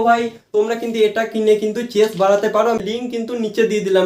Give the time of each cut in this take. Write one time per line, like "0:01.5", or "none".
none